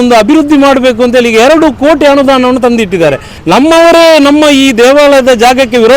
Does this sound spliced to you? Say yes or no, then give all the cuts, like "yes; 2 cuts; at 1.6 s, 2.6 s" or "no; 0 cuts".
yes; 1 cut; at 3.3 s